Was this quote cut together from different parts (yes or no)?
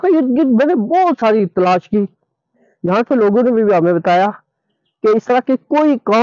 no